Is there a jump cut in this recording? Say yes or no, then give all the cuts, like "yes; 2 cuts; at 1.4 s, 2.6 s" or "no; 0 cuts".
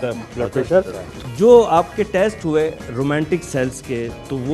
yes; 1 cut; at 1.2 s